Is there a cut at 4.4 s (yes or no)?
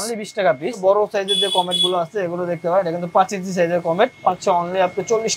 yes